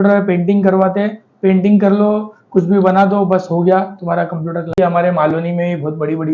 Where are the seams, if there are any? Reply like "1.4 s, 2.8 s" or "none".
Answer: 4.8 s